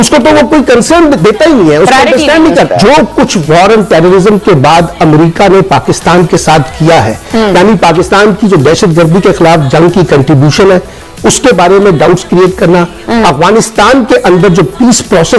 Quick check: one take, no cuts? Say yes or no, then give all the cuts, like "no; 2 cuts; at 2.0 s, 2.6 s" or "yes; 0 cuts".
no; 1 cut; at 2.7 s